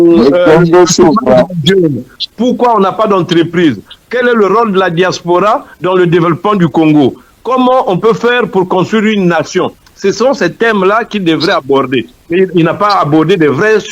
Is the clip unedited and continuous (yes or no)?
yes